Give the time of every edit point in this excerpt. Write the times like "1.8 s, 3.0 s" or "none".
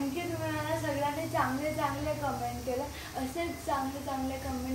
none

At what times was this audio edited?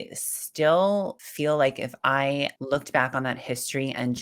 1.2 s, 2.6 s

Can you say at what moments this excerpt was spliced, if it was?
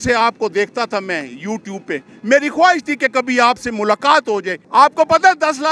4.6 s

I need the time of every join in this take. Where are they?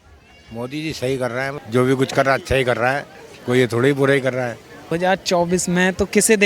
1.6 s, 4.9 s

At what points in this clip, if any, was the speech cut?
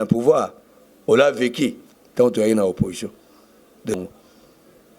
3.9 s

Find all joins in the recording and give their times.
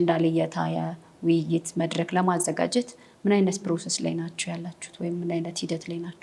none

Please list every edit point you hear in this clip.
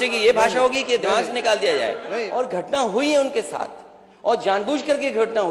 2.1 s

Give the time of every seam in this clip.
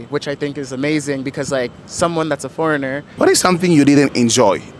3.0 s

